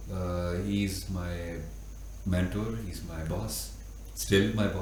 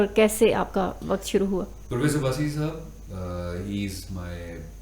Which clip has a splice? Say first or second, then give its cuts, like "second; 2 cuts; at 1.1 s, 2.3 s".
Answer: second; 1 cut; at 1.8 s